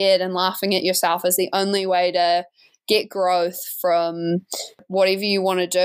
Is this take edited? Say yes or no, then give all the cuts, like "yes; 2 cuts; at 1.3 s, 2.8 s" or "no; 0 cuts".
yes; 1 cut; at 4.8 s